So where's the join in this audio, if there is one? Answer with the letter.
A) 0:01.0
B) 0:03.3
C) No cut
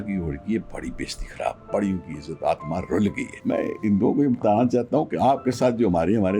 B